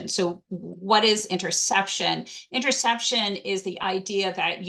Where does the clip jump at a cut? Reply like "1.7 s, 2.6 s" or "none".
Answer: none